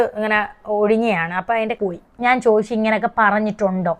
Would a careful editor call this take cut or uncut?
cut